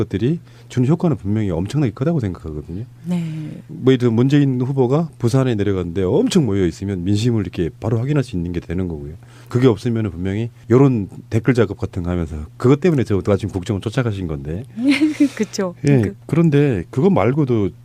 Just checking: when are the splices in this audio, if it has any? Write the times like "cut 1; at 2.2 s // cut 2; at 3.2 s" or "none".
none